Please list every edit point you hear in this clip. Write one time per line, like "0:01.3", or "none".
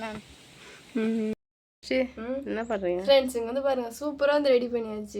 0:01.4